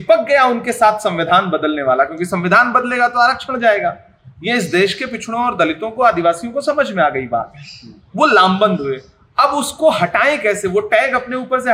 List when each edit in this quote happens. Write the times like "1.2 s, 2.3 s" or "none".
none

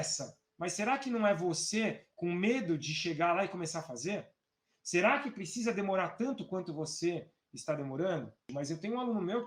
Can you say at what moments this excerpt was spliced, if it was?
8.5 s

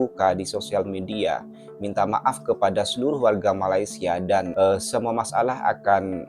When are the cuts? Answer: 4.5 s

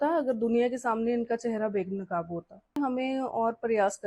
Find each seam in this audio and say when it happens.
2.8 s

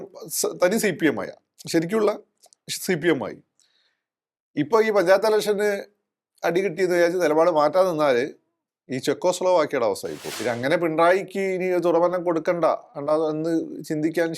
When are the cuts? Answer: 10.3 s

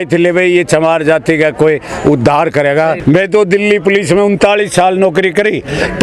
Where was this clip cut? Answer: 3.0 s

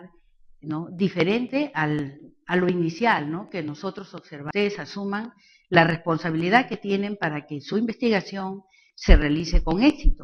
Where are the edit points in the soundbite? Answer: none

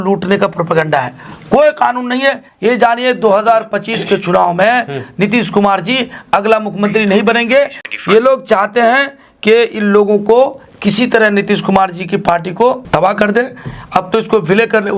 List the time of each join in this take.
2.5 s, 7.8 s, 12.8 s

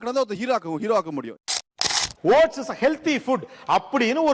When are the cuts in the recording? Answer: 1.7 s

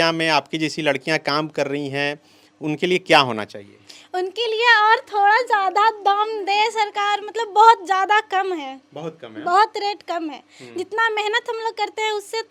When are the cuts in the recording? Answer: none

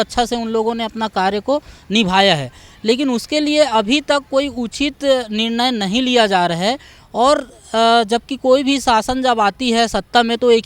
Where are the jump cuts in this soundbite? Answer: none

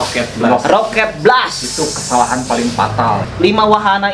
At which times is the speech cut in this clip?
3.2 s

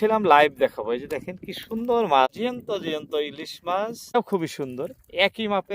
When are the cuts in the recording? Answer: 2.3 s, 4.1 s

